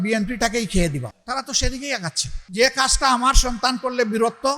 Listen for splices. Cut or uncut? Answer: cut